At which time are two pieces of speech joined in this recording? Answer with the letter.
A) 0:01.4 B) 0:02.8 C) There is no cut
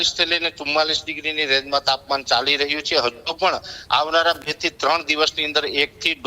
C